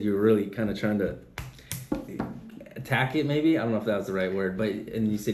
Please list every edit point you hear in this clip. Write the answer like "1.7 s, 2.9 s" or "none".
none

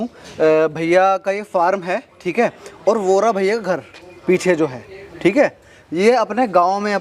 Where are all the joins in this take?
none

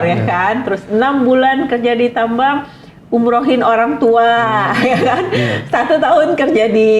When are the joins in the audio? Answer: none

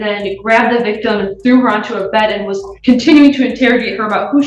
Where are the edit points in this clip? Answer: none

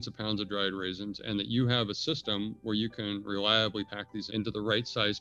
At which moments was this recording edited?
4.0 s

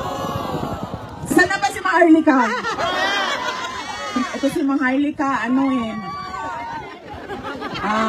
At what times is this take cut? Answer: 1.3 s

